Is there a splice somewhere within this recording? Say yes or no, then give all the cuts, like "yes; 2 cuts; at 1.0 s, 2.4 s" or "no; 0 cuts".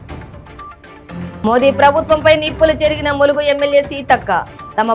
yes; 1 cut; at 1.4 s